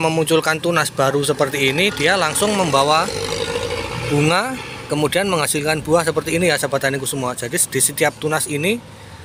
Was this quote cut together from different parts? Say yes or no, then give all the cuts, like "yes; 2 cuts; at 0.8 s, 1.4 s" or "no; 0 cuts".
no; 0 cuts